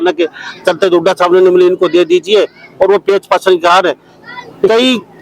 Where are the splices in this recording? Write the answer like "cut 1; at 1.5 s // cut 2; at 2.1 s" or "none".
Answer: none